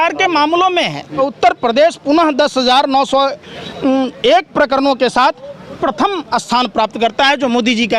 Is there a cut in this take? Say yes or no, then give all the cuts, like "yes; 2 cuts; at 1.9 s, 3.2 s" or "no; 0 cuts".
yes; 1 cut; at 1.2 s